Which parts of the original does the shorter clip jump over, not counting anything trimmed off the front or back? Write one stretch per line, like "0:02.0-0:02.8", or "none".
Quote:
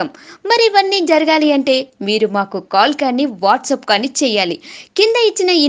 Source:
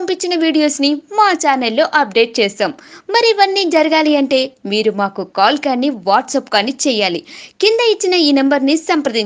none